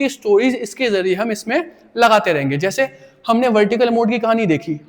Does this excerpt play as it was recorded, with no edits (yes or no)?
yes